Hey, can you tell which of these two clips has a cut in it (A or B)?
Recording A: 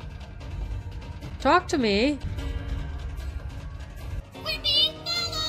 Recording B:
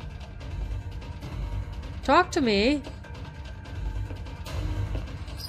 A